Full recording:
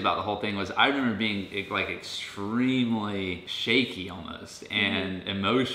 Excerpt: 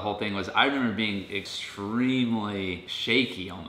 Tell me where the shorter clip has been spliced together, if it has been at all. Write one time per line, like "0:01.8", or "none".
0:01.4

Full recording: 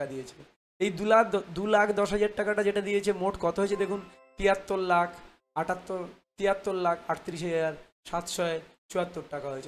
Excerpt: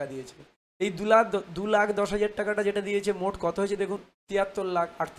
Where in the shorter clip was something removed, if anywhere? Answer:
0:04.1

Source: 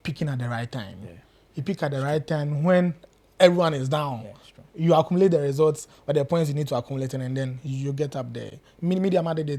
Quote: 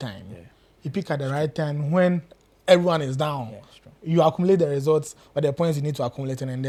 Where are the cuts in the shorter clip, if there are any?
none

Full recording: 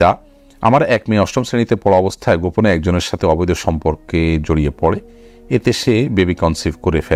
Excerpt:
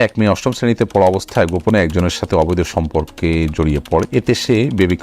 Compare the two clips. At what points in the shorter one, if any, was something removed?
0:04.1

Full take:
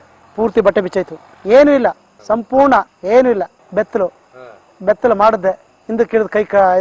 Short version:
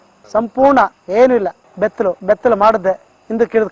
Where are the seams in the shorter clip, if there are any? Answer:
0:02.2

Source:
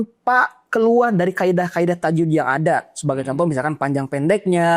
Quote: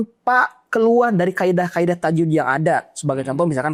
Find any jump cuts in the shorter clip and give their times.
none

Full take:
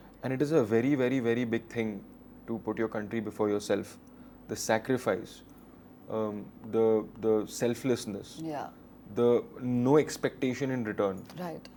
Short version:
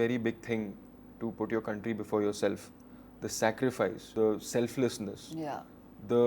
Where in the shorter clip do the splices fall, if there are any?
0:04.0

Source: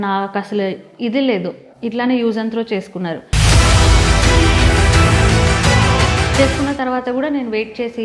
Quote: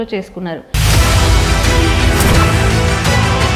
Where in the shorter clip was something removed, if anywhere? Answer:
none

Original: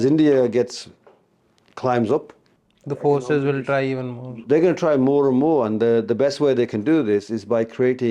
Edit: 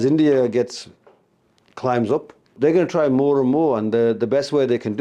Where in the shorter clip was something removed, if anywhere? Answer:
0:02.4

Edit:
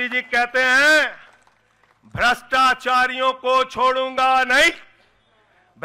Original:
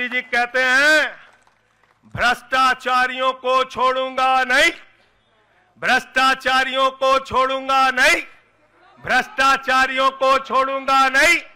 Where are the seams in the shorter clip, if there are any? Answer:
none

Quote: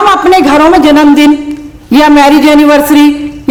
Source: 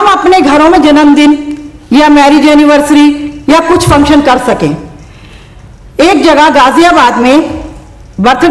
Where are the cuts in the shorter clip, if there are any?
none

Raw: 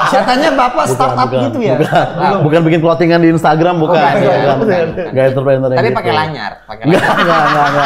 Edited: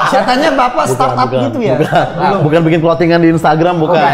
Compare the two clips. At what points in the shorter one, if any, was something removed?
none

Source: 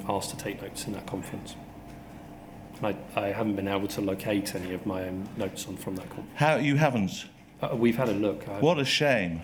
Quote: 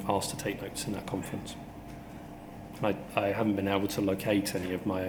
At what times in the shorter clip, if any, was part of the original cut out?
none

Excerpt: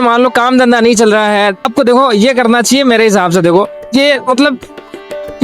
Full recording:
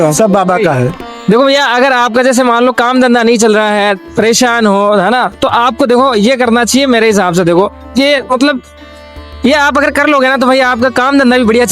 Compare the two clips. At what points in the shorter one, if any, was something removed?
0:01.7

